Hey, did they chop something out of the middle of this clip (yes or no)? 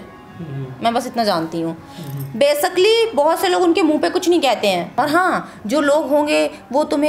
yes